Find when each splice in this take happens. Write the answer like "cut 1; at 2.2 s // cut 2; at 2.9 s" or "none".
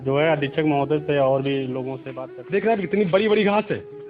cut 1; at 2.0 s

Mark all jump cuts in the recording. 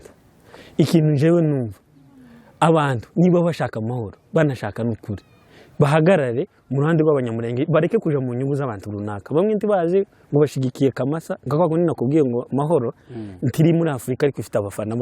none

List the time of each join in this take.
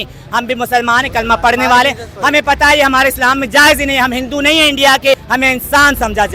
cut 1; at 5.2 s

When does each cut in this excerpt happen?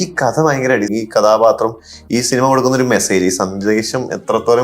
cut 1; at 0.9 s

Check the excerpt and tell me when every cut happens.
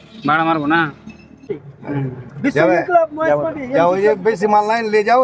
cut 1; at 1.5 s

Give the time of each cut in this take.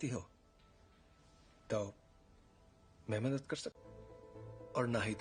none

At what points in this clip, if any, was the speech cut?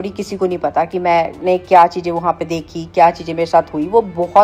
none

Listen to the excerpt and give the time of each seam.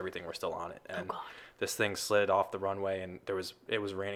none

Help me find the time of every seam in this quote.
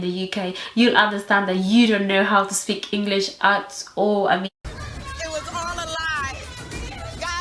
cut 1; at 4.5 s

